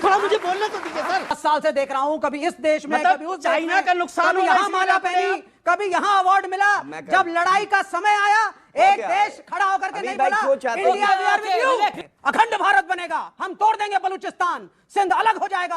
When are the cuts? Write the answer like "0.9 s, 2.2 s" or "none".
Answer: 1.4 s, 12.0 s